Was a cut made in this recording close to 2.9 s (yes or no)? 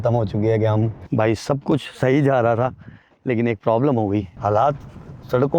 no